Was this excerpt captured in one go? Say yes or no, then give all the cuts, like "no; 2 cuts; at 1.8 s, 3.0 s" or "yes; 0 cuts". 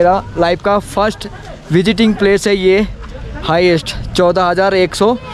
yes; 0 cuts